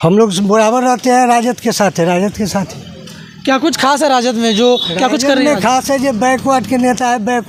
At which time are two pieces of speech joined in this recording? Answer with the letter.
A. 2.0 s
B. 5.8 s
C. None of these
C